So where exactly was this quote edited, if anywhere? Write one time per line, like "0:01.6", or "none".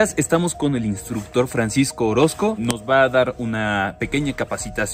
none